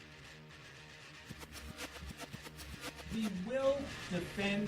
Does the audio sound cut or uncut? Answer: cut